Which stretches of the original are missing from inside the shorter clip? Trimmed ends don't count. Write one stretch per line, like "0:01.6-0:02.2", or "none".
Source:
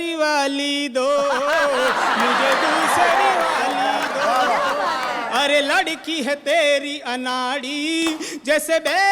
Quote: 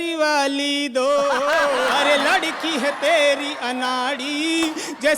0:02.0-0:05.4